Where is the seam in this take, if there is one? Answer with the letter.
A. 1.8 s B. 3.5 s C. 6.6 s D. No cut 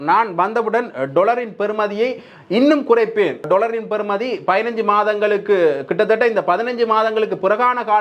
B